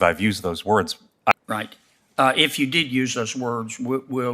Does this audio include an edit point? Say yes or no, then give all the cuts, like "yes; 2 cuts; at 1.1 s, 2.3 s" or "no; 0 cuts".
yes; 1 cut; at 1.3 s